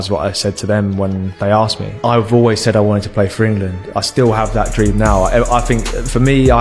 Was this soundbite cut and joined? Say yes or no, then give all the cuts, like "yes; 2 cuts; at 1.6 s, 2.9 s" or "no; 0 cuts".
no; 0 cuts